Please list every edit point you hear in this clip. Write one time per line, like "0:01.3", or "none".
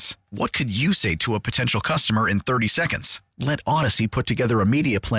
none